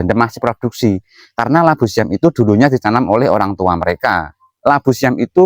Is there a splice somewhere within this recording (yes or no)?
yes